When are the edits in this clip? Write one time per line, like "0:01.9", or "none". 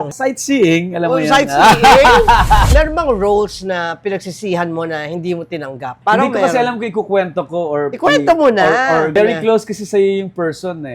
0:02.7
0:05.9
0:09.1